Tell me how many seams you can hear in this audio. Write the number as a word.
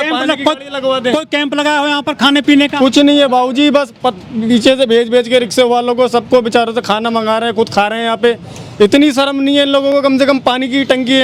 zero